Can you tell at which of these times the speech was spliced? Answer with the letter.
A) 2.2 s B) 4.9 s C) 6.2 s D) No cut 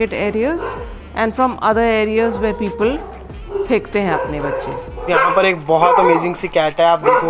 B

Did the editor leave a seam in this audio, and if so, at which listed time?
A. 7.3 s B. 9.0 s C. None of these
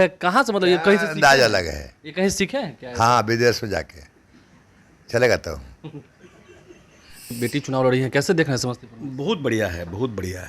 A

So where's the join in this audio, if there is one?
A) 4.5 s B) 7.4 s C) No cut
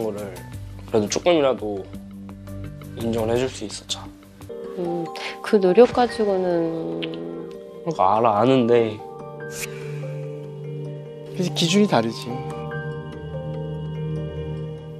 A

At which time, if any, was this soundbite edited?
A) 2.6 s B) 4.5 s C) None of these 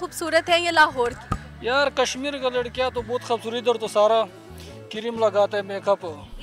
C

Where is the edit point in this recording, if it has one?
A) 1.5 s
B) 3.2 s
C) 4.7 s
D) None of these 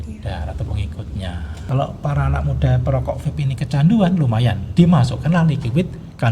A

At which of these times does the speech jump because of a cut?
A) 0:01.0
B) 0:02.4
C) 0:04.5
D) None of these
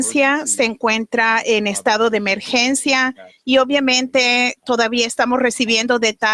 B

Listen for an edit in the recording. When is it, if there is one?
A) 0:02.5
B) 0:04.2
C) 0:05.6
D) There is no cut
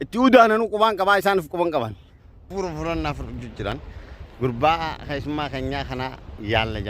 A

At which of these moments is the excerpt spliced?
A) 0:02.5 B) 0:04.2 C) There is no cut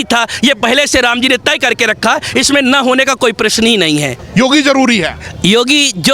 B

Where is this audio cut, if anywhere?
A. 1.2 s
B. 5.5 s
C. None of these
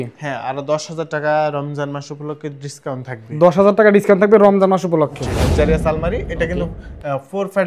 B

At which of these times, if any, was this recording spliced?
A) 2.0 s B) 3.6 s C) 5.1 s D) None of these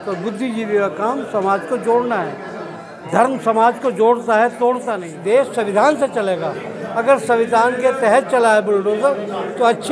C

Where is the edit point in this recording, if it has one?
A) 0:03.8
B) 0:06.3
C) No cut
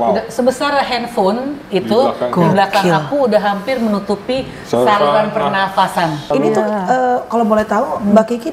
B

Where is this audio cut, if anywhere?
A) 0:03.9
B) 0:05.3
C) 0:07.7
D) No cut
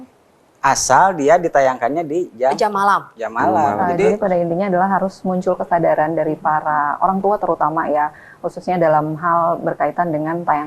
A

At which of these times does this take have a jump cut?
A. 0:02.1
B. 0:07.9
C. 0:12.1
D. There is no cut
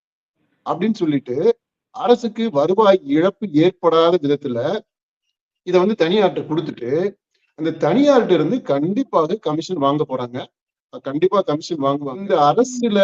C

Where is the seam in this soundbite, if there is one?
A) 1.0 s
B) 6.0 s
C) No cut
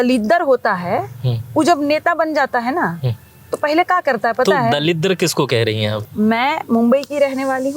B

